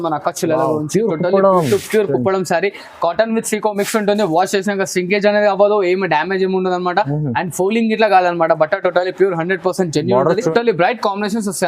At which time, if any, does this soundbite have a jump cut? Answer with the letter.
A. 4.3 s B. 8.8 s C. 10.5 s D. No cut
C